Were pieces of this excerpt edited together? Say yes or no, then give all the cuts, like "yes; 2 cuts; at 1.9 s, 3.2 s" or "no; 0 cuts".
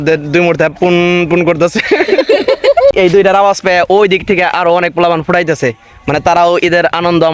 yes; 1 cut; at 2.9 s